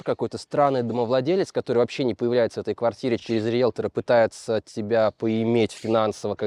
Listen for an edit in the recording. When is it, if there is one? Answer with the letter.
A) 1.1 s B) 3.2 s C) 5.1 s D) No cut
D